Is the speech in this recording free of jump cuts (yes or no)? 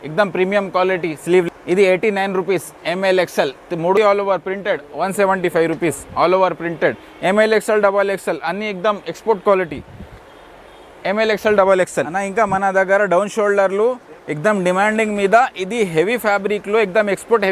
no